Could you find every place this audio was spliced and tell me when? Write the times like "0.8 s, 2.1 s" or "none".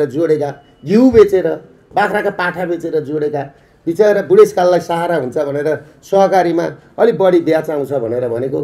none